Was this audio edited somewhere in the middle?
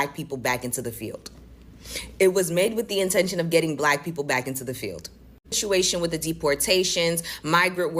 yes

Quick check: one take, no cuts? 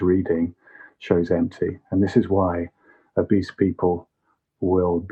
yes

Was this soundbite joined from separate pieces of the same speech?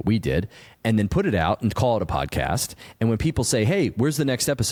no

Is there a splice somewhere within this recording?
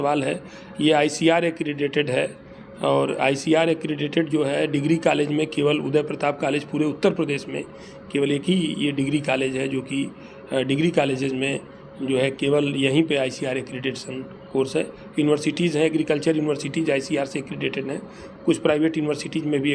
no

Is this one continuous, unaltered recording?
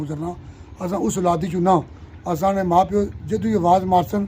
yes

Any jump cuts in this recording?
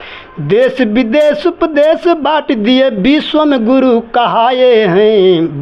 no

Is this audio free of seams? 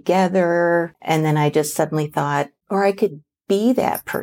no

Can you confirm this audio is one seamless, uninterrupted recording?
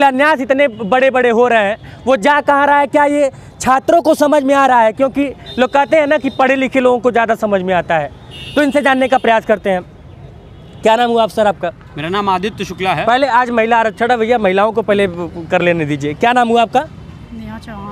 yes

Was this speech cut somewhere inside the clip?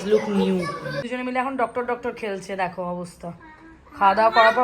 yes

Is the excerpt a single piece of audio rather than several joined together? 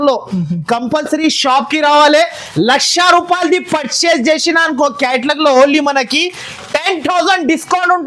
yes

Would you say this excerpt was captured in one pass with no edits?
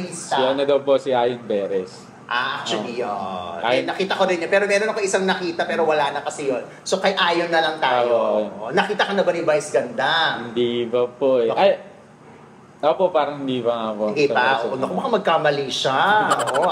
yes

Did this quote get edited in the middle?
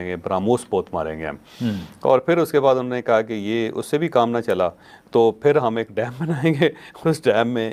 no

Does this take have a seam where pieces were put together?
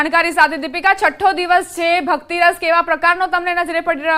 yes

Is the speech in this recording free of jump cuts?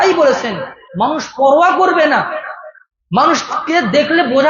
yes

